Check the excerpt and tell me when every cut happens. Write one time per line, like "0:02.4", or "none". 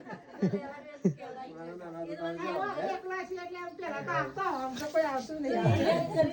none